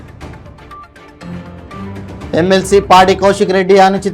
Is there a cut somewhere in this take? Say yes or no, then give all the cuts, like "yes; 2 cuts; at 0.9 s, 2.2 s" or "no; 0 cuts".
yes; 1 cut; at 2.0 s